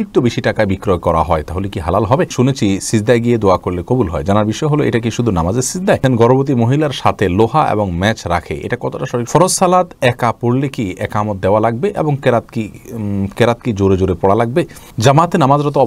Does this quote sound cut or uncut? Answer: cut